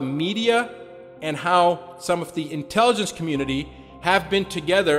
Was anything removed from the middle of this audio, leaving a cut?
no; 0 cuts

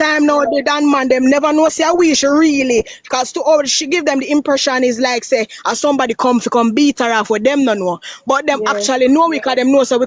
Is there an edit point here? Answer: no; 0 cuts

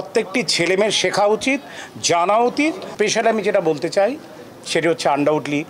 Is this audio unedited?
no; 1 cut; at 2.9 s

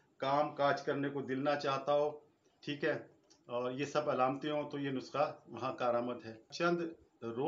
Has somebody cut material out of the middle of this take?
yes; 1 cut; at 6.5 s

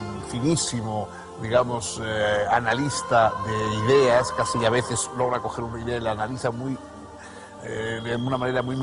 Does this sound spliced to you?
yes; 1 cut; at 2.0 s

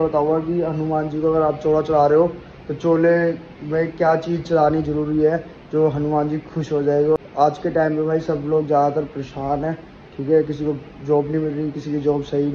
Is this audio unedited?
yes; 0 cuts

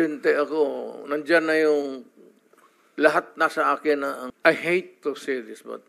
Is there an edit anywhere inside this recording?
yes; 1 cut; at 4.3 s

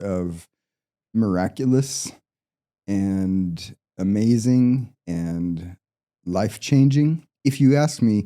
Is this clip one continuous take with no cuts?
no; 1 cut; at 7.3 s

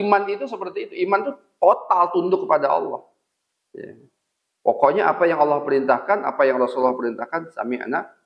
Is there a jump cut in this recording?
no; 0 cuts

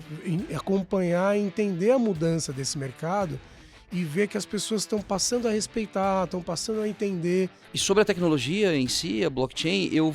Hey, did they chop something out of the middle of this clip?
yes; 1 cut; at 7.7 s

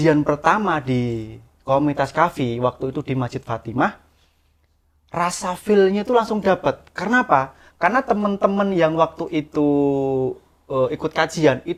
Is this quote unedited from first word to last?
yes; 0 cuts

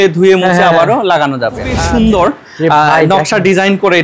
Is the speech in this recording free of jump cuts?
no; 1 cut; at 1.8 s

